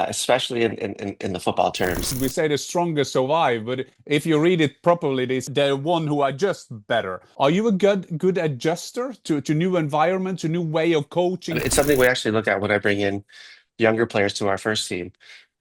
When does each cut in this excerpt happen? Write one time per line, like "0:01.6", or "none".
0:02.2
0:05.4
0:07.2
0:11.6